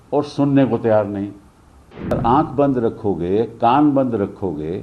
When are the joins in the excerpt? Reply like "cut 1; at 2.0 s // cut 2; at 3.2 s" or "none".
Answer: cut 1; at 2.2 s